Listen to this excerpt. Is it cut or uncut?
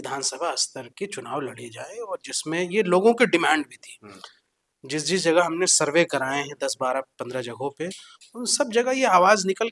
uncut